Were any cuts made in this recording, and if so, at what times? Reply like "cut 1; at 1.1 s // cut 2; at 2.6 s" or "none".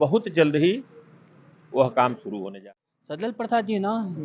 cut 1; at 2.6 s